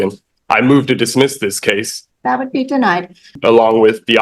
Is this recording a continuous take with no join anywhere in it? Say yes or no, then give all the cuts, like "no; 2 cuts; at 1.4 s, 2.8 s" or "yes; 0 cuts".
no; 2 cuts; at 2.0 s, 3.3 s